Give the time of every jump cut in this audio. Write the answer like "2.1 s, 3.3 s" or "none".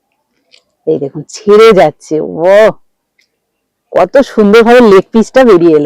none